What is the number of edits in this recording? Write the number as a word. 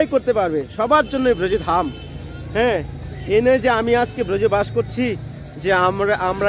zero